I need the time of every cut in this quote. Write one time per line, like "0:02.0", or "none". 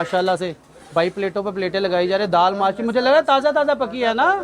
none

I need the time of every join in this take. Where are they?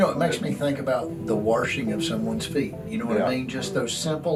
none

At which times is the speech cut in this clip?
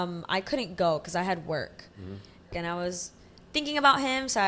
0:02.5

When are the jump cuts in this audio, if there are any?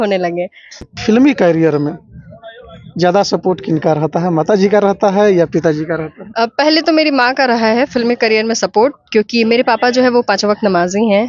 0:00.9

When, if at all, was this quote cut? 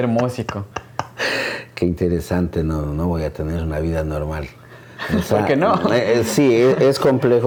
none

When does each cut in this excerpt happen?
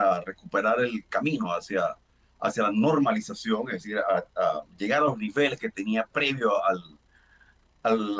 none

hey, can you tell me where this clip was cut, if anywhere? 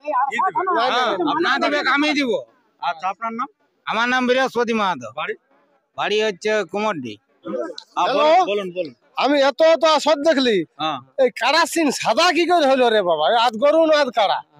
0:07.4

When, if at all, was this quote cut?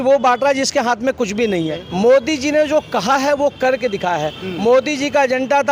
0:01.8

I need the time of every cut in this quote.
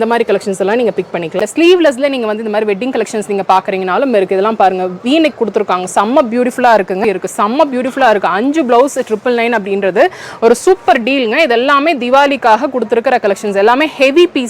0:01.4
0:07.0

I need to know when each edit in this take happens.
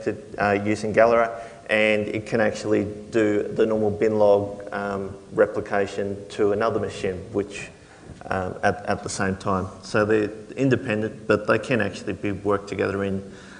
0:11.8

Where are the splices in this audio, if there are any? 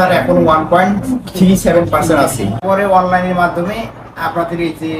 0:02.6

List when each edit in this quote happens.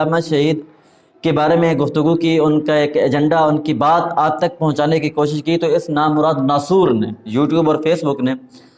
none

